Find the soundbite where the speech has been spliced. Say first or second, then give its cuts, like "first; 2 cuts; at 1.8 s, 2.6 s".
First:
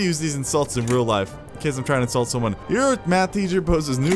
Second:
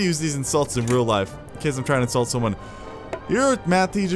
first; 1 cut; at 2.6 s